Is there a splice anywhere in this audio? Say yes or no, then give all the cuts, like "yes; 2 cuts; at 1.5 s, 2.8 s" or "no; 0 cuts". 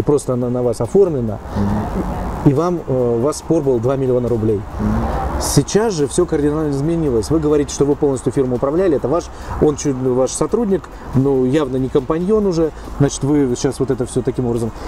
no; 0 cuts